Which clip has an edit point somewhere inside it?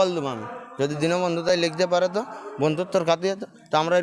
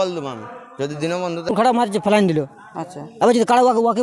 second; 1 cut; at 1.5 s

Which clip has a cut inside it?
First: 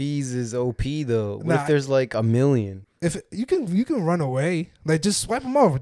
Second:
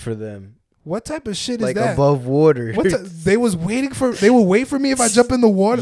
first; 1 cut; at 2.8 s

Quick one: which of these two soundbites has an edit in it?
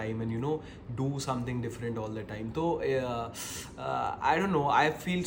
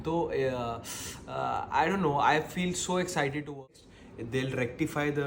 second; 1 cut; at 3.8 s

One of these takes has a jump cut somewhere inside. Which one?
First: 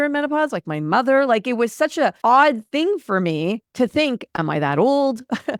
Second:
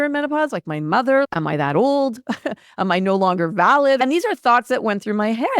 second; 2 cuts; at 1.3 s, 4.0 s

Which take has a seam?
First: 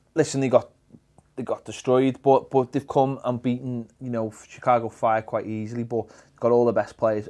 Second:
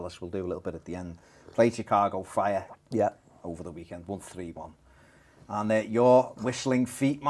second; 1 cut; at 1.9 s

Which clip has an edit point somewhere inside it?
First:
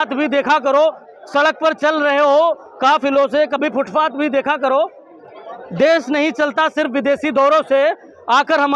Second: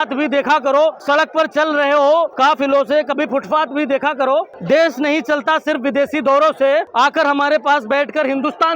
second; 4 cuts; at 1.0 s, 2.3 s, 4.6 s, 6.9 s

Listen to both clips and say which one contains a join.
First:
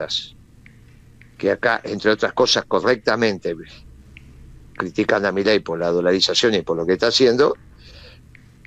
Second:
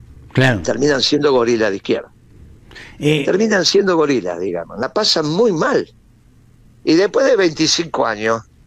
second; 1 cut; at 4.8 s

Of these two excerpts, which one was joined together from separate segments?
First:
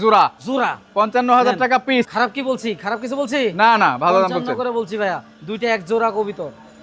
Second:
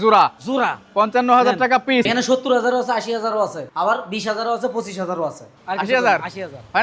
second; 2 cuts; at 2.1 s, 5.5 s

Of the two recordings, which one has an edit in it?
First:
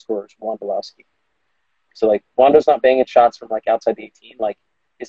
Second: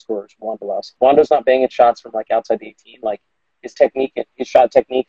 second; 1 cut; at 0.9 s

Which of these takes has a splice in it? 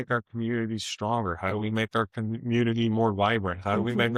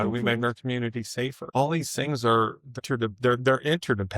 second; 2 cuts; at 1.4 s, 2.8 s

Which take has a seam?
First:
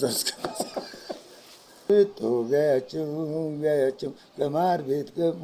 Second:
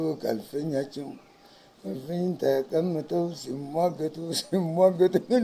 first; 1 cut; at 1.8 s

